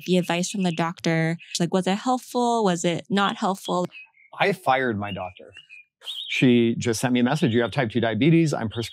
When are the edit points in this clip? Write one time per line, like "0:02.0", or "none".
0:01.5
0:03.8
0:05.9